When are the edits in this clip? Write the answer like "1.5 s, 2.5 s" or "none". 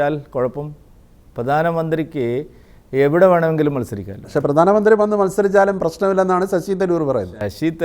4.3 s